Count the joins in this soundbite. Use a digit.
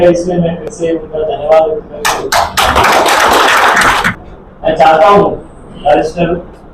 1